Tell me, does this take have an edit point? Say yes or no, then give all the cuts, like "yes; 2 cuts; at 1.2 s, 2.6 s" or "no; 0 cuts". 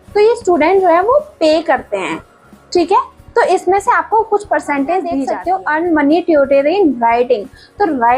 yes; 1 cut; at 5.3 s